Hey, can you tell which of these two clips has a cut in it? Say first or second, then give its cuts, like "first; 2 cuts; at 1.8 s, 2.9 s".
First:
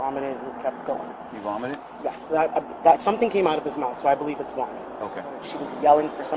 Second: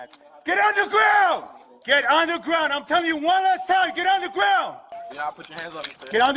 second; 1 cut; at 5.0 s